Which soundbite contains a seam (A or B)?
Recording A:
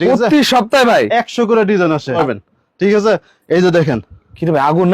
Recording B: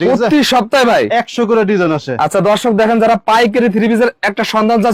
A